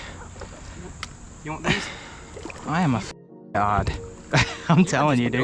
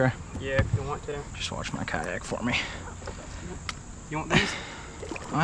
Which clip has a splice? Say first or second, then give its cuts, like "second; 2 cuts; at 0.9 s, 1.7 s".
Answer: second; 1 cut; at 1.3 s